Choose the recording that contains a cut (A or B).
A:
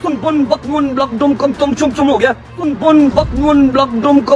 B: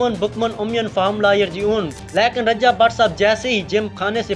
B